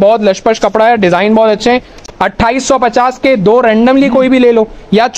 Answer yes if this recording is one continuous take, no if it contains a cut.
no